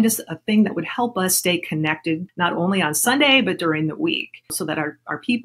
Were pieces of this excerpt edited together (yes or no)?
yes